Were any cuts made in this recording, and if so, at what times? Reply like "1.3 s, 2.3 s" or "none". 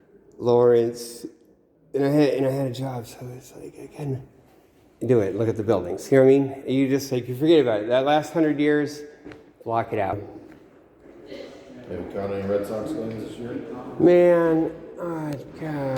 10.3 s